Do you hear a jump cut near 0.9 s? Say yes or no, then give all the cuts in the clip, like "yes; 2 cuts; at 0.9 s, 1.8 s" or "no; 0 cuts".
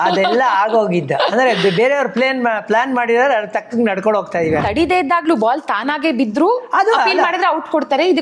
no; 1 cut; at 4.6 s